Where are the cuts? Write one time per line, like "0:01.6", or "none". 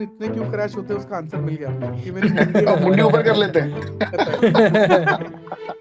0:01.9